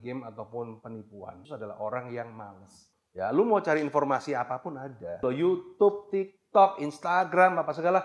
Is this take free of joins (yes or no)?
no